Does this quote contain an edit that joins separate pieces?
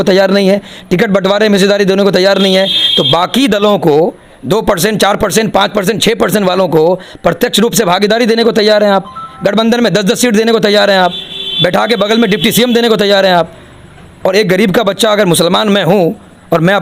no; 0 cuts

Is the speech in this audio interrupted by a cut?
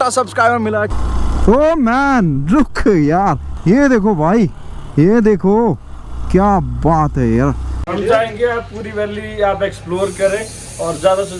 yes; 3 cuts; at 0.9 s, 3.5 s, 7.8 s

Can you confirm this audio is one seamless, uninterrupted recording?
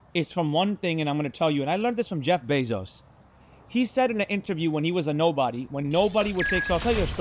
yes; 0 cuts

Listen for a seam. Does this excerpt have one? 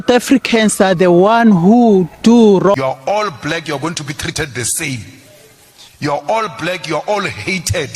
yes; 1 cut; at 2.8 s

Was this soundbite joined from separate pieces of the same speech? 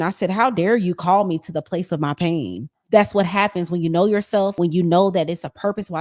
yes; 2 cuts; at 2.8 s, 4.5 s

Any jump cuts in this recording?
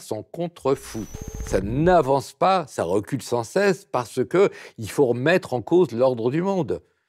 yes; 1 cut; at 1.2 s

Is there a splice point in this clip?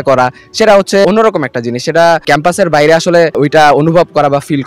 yes; 3 cuts; at 1.0 s, 2.2 s, 3.4 s

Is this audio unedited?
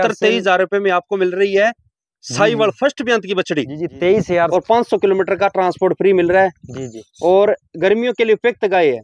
no; 1 cut; at 4.5 s

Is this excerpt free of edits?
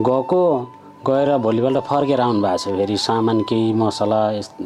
yes; 0 cuts

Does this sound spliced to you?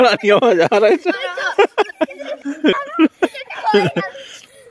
yes; 1 cut; at 2.7 s

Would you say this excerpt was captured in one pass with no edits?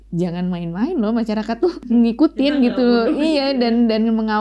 no; 1 cut; at 1.9 s

